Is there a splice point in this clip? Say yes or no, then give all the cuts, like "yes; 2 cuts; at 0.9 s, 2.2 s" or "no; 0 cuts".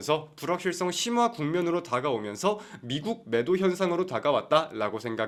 no; 0 cuts